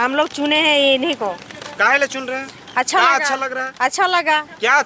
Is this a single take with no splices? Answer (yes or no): yes